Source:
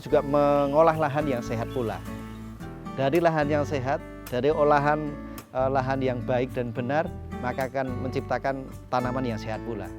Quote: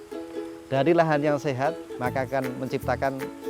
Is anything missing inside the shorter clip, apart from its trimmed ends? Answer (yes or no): yes